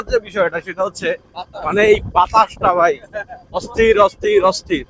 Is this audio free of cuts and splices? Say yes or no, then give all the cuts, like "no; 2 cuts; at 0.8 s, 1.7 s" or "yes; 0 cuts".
yes; 0 cuts